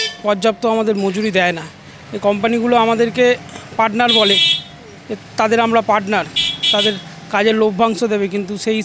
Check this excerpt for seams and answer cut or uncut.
uncut